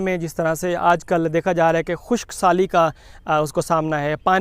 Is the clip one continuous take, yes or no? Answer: yes